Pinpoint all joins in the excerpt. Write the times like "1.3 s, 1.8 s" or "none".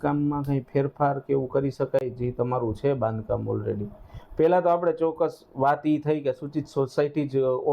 none